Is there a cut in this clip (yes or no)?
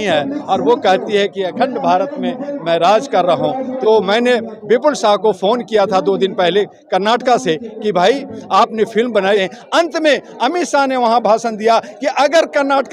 yes